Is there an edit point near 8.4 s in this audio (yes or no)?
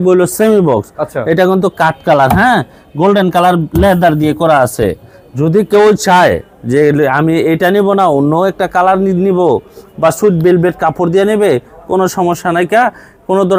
no